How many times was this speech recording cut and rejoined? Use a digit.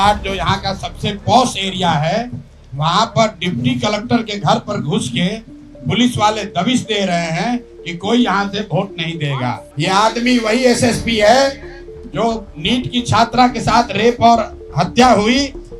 1